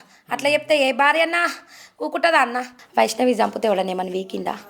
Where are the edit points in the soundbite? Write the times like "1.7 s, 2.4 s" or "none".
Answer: 2.8 s